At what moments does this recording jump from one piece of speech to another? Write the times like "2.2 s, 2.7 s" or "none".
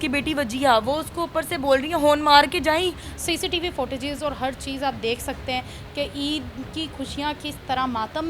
3.0 s